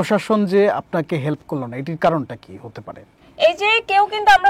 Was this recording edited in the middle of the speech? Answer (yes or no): no